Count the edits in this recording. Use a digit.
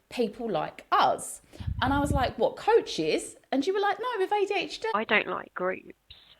1